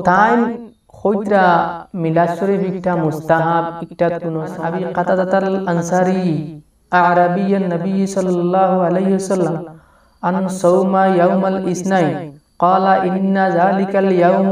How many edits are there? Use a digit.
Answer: 1